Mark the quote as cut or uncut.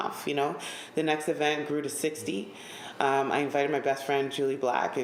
uncut